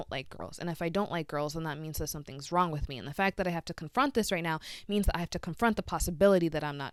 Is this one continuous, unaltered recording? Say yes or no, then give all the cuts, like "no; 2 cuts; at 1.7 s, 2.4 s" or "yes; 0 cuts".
yes; 0 cuts